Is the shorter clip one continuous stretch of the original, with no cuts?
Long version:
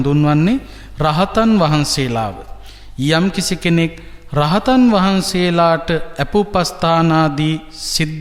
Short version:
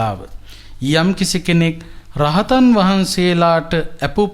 yes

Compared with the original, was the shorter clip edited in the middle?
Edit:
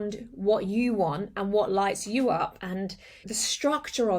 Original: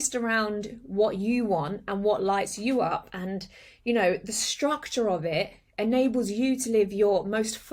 yes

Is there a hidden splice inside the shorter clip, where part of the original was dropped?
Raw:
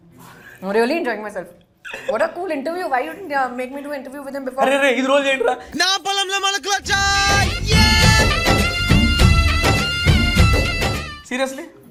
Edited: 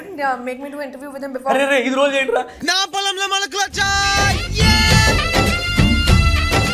no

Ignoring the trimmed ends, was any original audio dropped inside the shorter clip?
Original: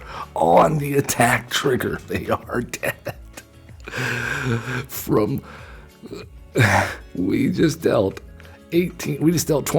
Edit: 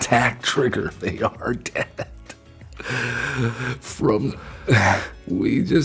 yes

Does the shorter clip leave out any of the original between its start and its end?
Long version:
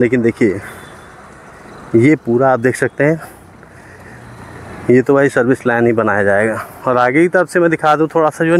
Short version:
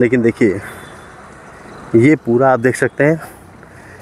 no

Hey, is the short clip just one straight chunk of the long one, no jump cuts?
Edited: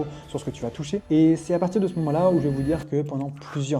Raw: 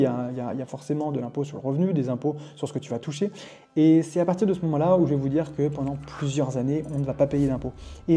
no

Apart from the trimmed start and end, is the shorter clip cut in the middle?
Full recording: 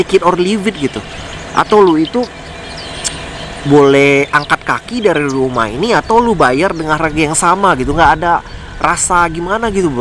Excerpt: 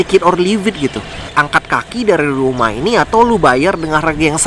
yes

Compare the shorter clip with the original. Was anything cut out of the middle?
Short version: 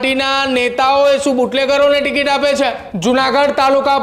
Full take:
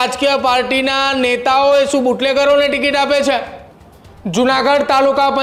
yes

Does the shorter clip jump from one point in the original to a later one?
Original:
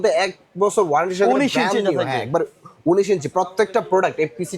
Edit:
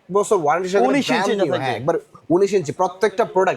yes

